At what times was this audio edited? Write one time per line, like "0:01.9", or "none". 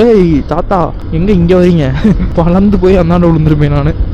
0:01.0
0:02.3